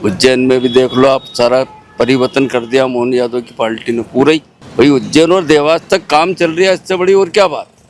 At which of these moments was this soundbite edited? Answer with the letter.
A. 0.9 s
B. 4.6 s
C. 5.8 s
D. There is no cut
B